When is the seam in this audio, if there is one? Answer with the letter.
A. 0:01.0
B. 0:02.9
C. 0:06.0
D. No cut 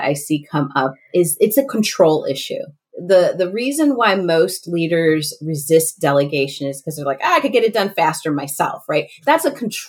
D